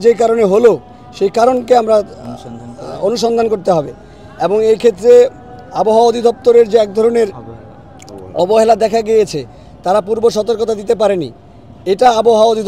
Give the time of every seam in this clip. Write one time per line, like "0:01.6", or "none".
none